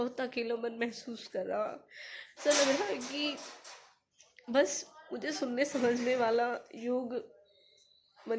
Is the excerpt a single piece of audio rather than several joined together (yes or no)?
yes